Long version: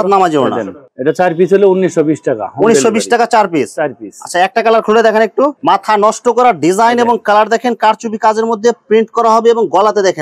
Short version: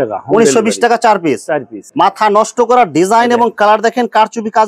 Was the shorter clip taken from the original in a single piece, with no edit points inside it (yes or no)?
no